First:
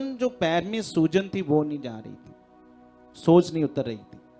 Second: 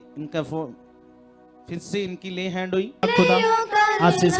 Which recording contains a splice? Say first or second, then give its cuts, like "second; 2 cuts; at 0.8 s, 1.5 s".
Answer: second; 1 cut; at 3.0 s